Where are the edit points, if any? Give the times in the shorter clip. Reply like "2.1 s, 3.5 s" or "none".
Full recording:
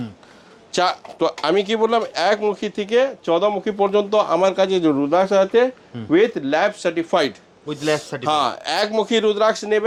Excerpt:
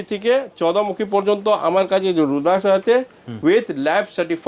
none